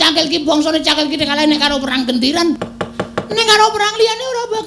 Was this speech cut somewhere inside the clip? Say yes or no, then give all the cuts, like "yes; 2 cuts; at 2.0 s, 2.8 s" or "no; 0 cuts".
yes; 1 cut; at 2.7 s